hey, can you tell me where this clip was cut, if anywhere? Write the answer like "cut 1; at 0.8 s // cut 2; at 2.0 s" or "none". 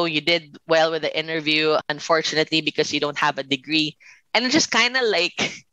cut 1; at 1.9 s